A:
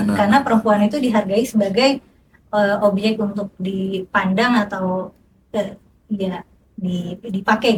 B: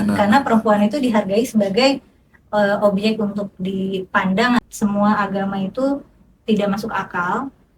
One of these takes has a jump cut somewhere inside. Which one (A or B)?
B